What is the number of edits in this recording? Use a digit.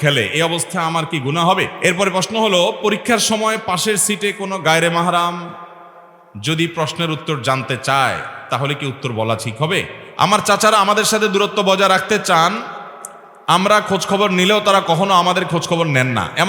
2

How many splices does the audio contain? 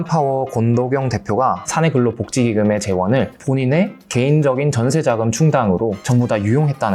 1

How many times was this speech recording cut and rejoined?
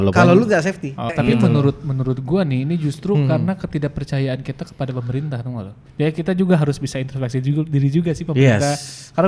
2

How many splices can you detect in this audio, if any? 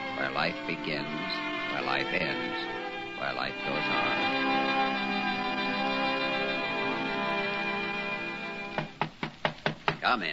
0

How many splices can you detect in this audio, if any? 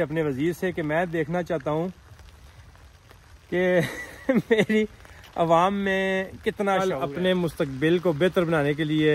1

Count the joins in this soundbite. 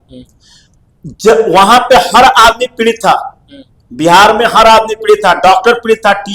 0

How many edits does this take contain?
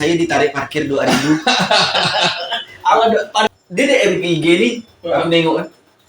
1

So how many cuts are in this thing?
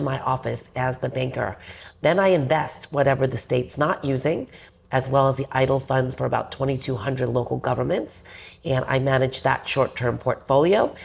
0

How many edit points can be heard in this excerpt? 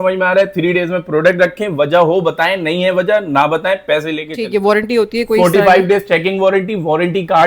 1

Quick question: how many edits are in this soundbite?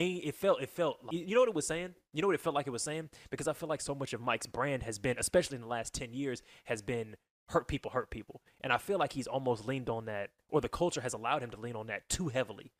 1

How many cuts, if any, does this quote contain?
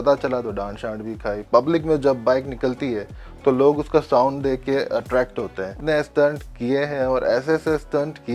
2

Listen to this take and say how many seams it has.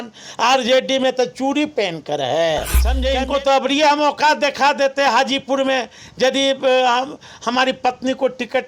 1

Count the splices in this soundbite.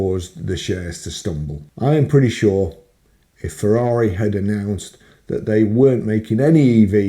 1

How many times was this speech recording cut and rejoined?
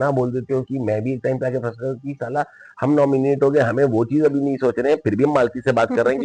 0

